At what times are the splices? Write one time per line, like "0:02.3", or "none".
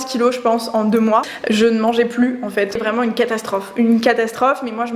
0:01.3
0:02.8